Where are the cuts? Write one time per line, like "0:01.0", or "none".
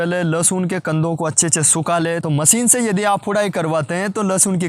0:02.2